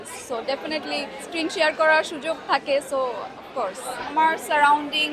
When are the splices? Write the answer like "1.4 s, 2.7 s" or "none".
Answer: 1.2 s, 4.1 s